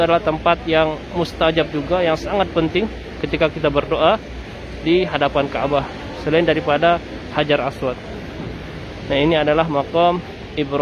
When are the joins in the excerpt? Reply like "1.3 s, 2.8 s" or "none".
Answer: none